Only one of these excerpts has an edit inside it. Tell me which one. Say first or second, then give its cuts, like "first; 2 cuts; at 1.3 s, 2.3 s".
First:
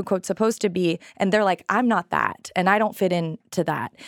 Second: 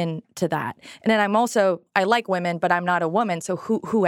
second; 1 cut; at 1.8 s